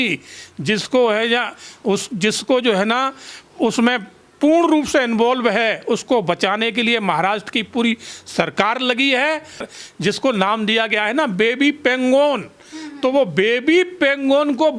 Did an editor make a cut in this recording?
yes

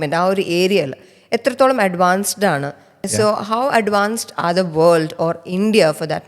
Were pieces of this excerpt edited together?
yes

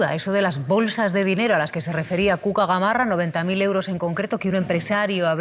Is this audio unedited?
yes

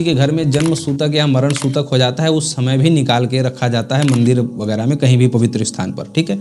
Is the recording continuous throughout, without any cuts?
yes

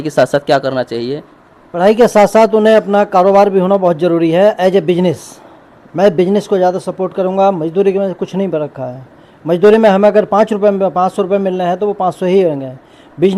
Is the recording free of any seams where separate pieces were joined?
yes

